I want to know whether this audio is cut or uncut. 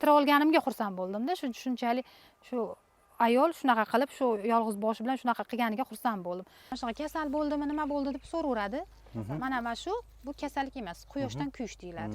cut